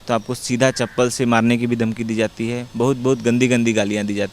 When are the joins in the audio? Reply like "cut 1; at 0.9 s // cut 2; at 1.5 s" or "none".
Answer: none